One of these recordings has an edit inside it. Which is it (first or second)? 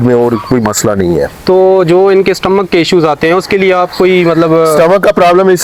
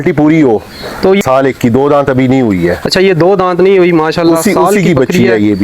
second